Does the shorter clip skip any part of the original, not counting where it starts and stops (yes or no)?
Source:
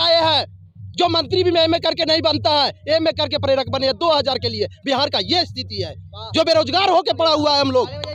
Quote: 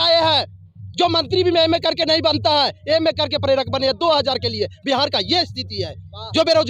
no